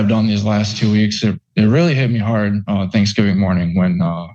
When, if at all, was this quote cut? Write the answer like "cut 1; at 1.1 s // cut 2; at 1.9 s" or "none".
none